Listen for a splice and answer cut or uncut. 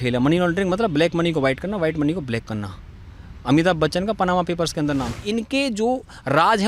cut